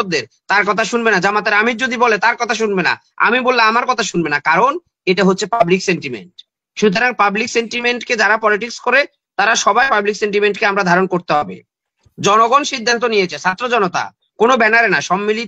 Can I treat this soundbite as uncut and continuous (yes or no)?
yes